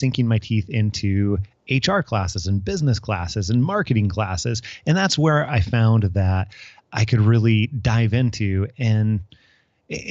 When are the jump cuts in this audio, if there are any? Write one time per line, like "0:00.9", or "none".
none